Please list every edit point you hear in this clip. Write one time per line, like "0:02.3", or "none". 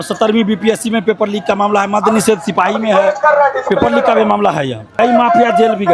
0:05.0